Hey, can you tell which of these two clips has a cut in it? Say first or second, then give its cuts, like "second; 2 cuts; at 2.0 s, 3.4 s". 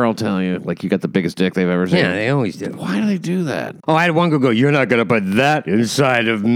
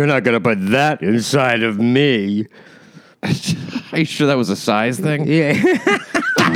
first; 1 cut; at 3.7 s